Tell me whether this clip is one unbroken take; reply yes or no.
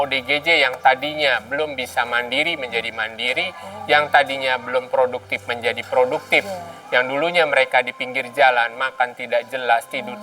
yes